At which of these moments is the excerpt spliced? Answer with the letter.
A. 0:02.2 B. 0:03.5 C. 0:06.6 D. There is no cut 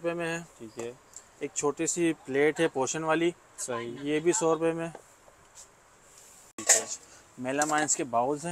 C